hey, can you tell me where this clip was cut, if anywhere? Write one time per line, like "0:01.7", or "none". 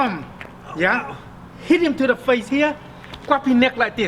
none